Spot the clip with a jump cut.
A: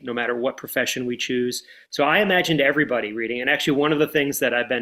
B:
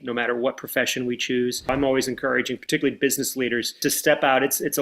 B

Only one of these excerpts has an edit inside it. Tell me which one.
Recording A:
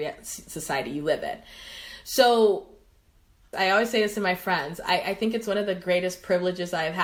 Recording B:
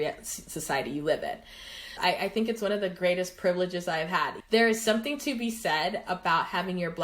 B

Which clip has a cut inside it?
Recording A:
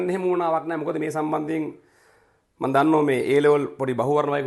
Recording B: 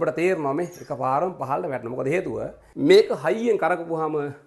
B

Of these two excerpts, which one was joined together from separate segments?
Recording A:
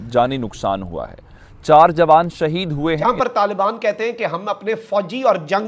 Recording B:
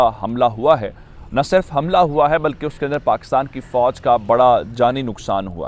A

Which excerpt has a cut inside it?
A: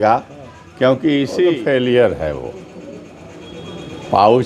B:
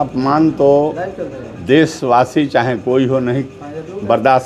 A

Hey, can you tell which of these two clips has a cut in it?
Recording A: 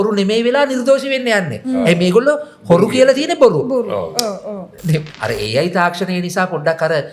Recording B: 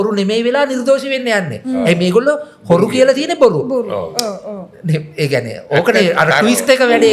A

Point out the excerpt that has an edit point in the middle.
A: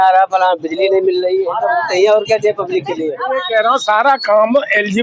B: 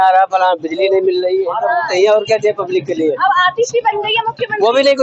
A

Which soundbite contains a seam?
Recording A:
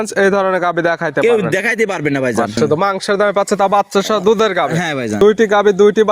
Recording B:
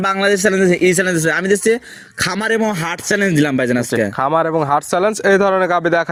A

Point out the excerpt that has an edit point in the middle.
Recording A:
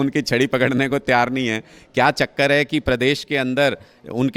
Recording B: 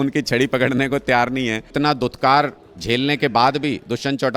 B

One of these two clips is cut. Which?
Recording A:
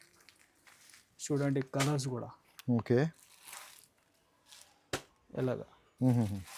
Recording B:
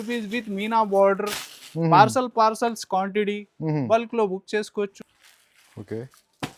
B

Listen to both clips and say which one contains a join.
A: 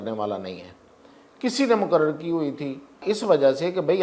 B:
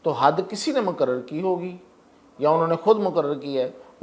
A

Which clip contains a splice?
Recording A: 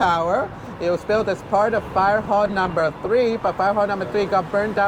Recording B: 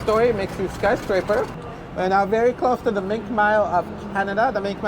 B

